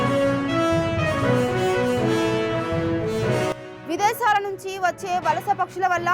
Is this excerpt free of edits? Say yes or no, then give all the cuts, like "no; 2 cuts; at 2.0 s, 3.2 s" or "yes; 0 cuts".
no; 1 cut; at 3.7 s